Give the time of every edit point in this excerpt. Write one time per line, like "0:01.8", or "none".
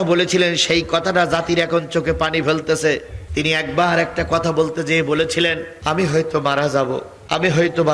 none